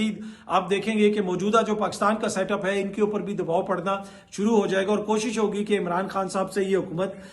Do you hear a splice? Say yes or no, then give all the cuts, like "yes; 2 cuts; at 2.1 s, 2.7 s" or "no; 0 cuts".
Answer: no; 0 cuts